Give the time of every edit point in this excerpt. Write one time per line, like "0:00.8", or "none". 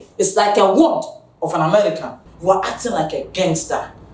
0:02.2